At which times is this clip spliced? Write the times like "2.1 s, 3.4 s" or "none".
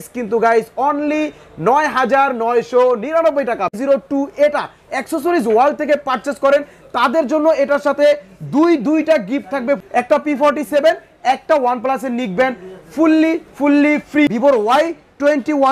3.8 s, 9.8 s, 14.3 s